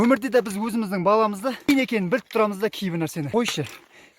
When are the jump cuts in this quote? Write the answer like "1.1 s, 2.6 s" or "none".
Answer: 1.7 s, 3.3 s